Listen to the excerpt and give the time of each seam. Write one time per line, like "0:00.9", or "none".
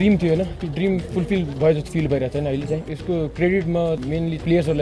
none